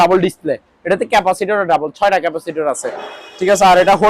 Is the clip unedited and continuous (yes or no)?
yes